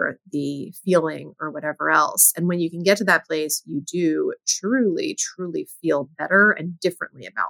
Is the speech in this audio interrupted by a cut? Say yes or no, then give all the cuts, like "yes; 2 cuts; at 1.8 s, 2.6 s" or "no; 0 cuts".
no; 0 cuts